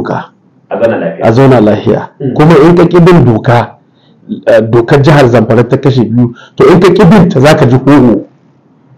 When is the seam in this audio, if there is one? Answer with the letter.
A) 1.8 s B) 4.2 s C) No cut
B